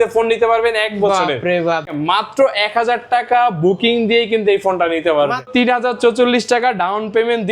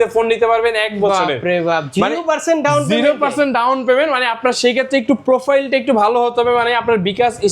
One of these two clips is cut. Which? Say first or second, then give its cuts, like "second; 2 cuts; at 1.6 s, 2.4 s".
first; 2 cuts; at 1.9 s, 5.5 s